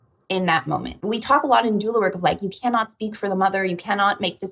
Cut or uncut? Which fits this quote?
cut